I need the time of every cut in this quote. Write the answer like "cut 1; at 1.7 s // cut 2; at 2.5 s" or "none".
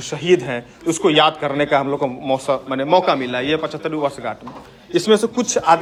none